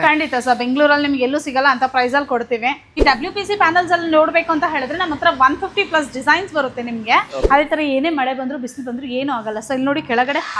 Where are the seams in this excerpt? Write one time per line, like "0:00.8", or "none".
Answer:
0:03.0
0:07.3